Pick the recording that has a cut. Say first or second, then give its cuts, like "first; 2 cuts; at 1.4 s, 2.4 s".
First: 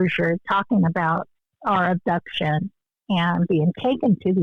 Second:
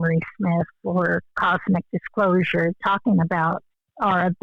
second; 1 cut; at 1.3 s